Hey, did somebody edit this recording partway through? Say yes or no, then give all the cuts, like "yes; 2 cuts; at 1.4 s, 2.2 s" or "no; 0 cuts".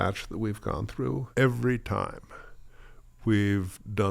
yes; 1 cut; at 1.2 s